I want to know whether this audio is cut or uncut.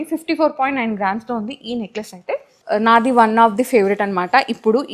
cut